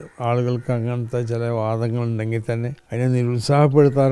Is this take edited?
yes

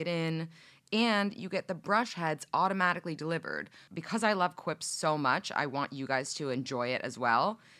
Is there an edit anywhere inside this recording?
yes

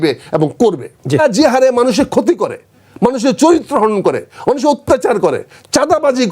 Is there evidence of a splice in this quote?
yes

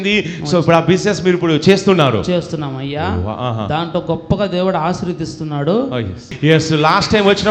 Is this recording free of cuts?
no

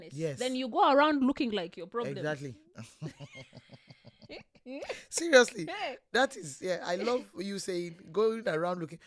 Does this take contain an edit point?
no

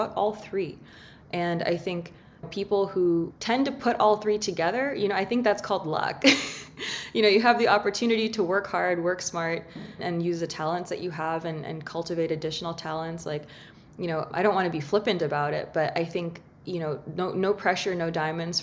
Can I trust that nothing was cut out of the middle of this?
no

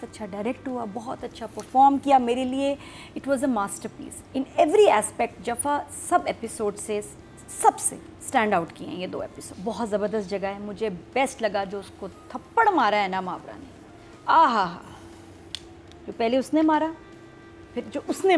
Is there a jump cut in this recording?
yes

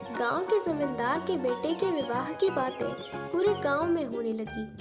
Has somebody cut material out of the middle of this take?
no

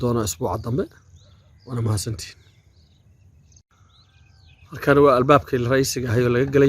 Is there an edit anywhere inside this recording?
yes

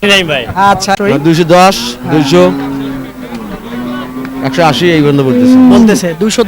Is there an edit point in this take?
yes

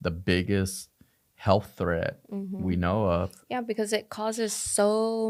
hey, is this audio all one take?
yes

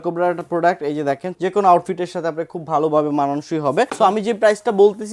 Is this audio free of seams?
no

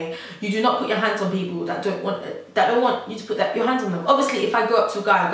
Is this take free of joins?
yes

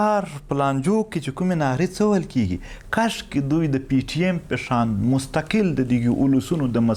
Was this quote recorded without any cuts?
yes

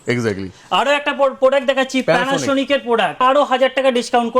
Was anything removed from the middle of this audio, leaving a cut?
yes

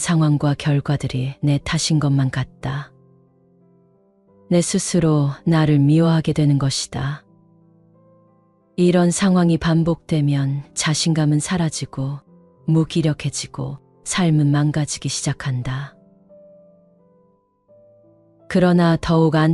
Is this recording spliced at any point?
yes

